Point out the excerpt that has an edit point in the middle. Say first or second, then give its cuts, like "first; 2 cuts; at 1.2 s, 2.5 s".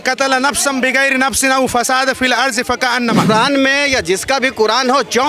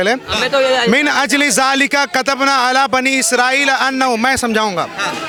first; 1 cut; at 3.3 s